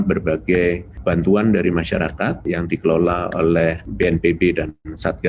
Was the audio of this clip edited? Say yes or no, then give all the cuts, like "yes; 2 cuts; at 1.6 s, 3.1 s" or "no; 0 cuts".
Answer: yes; 3 cuts; at 0.9 s, 2.4 s, 3.8 s